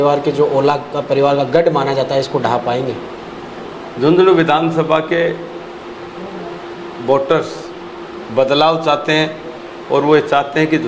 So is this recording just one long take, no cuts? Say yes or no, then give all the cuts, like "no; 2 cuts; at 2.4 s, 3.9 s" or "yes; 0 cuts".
yes; 0 cuts